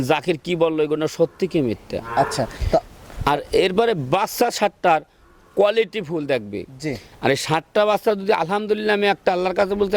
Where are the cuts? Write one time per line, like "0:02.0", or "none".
none